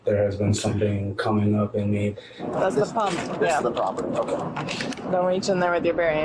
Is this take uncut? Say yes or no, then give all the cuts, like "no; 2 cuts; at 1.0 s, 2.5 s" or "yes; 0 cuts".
no; 2 cuts; at 2.2 s, 5.0 s